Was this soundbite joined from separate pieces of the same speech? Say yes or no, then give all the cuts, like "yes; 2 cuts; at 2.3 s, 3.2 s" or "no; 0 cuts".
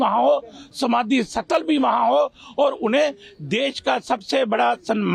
no; 0 cuts